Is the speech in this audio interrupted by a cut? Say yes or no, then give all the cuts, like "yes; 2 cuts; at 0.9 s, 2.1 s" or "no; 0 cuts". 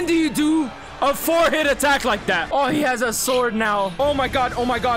yes; 2 cuts; at 2.5 s, 3.9 s